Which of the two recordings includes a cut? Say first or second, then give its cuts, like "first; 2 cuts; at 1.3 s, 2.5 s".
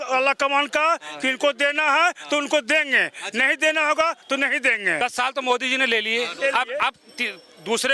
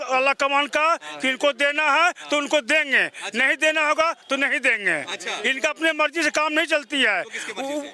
first; 1 cut; at 5.0 s